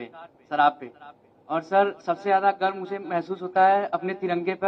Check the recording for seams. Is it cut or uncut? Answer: uncut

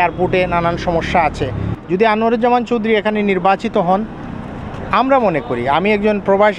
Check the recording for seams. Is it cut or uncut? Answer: uncut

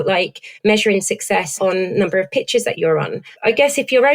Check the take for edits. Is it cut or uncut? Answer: cut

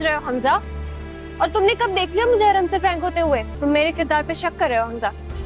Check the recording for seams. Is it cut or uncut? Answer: cut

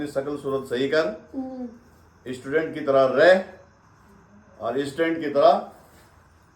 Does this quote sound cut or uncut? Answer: uncut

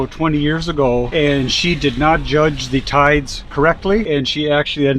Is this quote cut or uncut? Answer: cut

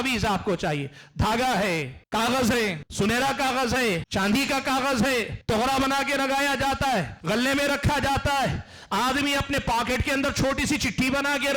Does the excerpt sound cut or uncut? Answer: cut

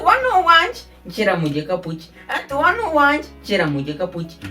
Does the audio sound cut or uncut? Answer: uncut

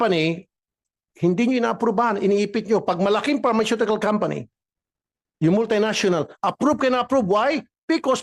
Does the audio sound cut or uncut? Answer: uncut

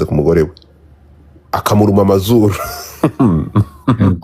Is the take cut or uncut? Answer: cut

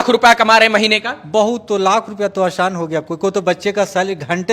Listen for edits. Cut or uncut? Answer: uncut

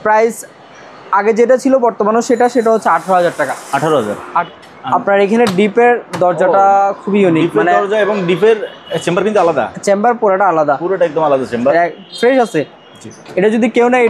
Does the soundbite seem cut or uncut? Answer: cut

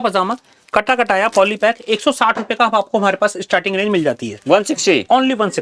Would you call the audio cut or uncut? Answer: uncut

